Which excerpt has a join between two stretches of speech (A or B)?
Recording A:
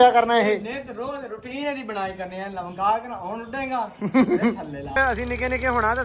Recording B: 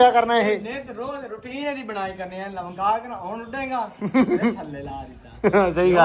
A